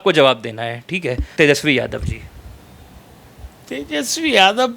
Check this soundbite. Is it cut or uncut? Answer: cut